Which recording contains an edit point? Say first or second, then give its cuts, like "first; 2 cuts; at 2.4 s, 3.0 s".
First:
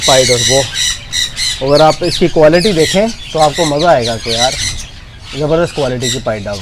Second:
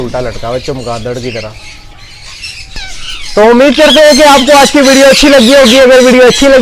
second; 1 cut; at 2.8 s